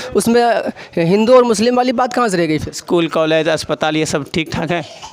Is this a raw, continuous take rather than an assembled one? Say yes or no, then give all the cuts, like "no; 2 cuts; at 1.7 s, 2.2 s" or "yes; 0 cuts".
no; 1 cut; at 2.8 s